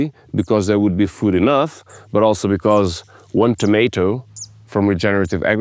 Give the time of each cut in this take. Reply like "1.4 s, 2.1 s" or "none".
none